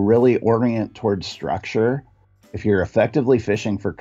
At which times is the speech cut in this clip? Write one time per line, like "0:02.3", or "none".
0:02.5